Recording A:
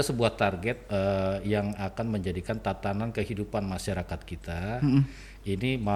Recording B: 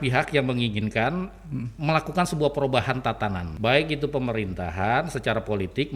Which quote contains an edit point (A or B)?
B